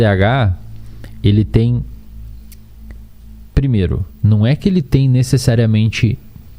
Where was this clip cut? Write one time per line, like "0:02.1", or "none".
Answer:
none